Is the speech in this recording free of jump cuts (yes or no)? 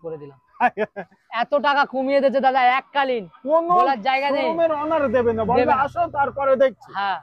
yes